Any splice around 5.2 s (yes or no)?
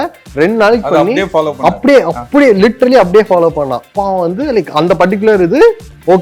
no